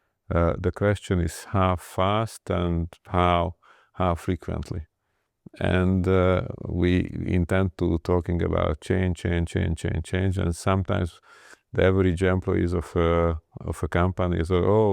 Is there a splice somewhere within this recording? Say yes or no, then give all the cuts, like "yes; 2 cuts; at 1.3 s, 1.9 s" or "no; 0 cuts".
no; 0 cuts